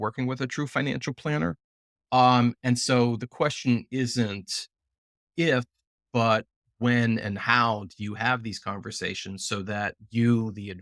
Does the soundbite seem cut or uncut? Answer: uncut